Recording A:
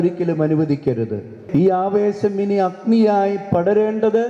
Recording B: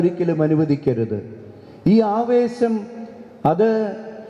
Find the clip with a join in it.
A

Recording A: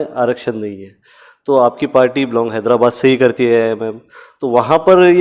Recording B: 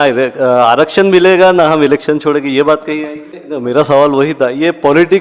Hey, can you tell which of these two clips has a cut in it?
B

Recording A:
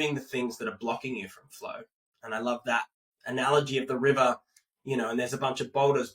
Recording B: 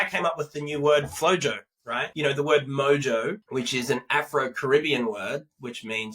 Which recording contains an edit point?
B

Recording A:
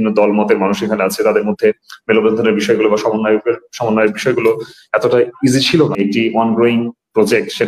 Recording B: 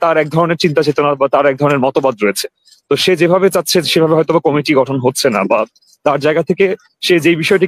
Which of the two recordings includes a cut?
A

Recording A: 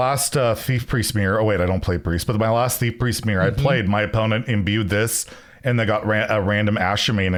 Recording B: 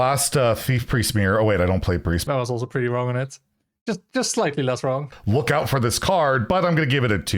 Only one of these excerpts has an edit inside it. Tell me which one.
B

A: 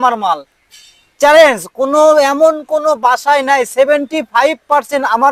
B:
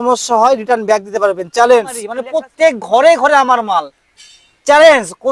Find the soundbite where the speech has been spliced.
B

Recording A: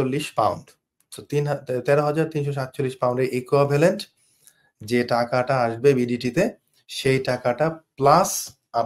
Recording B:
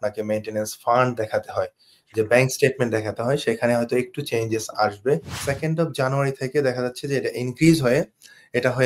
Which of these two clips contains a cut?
B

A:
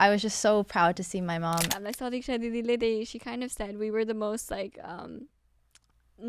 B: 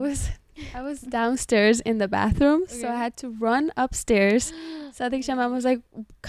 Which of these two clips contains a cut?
A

